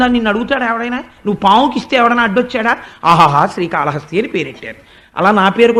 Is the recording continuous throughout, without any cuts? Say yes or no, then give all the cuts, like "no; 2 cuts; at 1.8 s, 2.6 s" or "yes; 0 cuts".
yes; 0 cuts